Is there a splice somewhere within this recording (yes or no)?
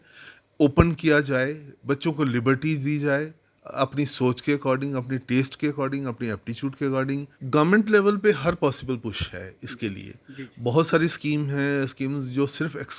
yes